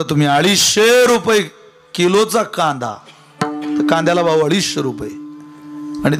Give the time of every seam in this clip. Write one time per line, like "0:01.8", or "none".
none